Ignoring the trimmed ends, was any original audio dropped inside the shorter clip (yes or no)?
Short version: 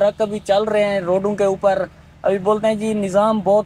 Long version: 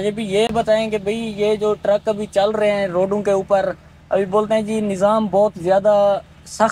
no